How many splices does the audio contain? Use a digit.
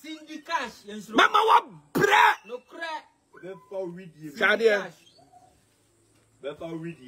0